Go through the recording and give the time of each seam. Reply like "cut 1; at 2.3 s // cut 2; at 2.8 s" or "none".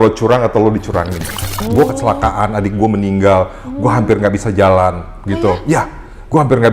cut 1; at 1.5 s